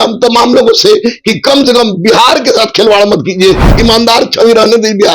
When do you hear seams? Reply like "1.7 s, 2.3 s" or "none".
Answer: 3.7 s